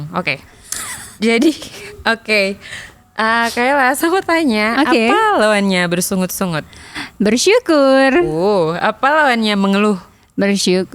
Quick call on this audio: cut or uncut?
uncut